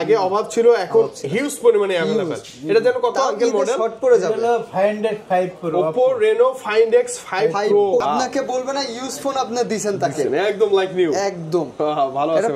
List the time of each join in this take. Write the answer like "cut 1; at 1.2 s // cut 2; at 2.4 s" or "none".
cut 1; at 8.0 s